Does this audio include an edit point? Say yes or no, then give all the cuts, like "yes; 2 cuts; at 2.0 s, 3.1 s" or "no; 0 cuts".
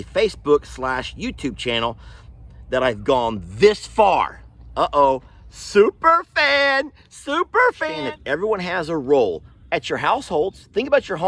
yes; 1 cut; at 7.9 s